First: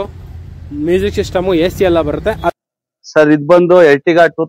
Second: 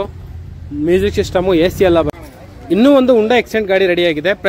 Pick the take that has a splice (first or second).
first